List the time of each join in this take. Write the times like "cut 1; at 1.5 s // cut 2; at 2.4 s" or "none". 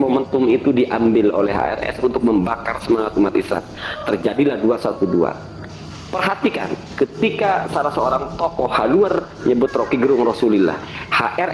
none